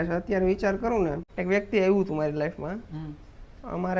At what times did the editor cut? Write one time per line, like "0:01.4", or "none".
0:01.3